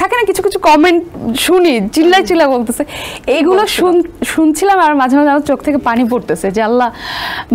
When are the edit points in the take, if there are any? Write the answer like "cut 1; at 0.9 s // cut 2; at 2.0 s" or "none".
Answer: none